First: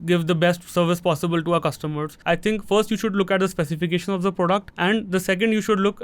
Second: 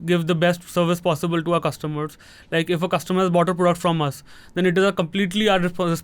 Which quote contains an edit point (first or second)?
first